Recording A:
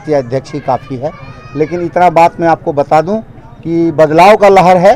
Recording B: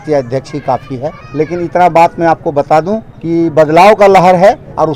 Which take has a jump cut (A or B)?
B